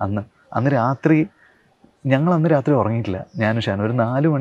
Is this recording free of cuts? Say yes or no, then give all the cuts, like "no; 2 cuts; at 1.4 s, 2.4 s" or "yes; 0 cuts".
yes; 0 cuts